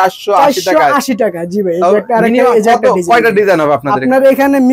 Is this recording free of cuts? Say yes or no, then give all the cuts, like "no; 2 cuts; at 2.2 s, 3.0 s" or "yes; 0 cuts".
yes; 0 cuts